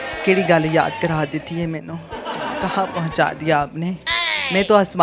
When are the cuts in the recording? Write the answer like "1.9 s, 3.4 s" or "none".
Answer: none